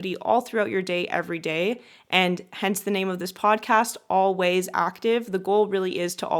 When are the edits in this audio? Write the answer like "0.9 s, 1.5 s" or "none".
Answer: none